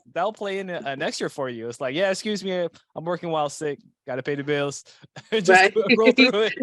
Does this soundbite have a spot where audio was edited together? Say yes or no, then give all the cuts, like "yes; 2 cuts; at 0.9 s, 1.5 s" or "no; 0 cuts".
no; 0 cuts